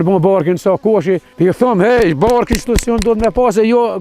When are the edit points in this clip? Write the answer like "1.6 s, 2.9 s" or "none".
1.3 s